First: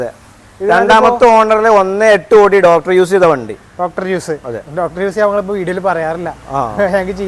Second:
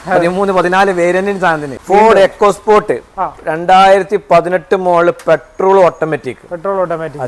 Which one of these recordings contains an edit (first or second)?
second